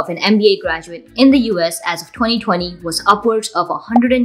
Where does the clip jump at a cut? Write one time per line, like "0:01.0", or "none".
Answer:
none